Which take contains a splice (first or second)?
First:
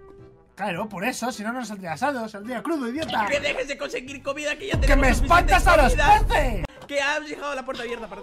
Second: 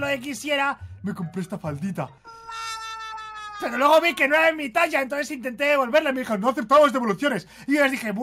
first